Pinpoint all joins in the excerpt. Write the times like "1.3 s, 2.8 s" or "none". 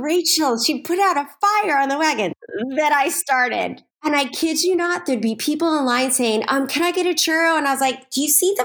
none